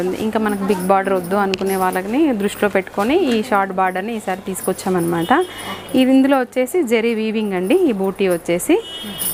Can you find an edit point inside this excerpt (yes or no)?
no